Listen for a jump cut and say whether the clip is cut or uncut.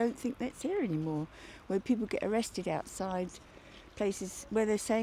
uncut